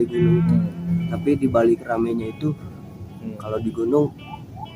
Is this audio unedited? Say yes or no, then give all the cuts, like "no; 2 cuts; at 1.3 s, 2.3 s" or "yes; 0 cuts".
no; 1 cut; at 1.1 s